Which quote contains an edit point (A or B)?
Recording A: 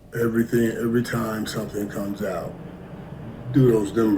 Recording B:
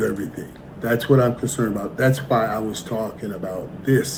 A